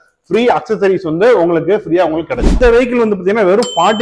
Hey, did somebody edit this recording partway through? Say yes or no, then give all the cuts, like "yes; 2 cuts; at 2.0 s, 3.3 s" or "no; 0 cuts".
yes; 1 cut; at 2.5 s